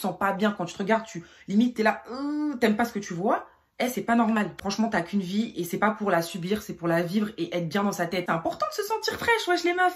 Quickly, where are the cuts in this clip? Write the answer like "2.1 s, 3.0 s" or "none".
4.5 s, 8.2 s